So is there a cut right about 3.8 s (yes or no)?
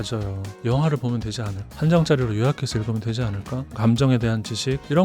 yes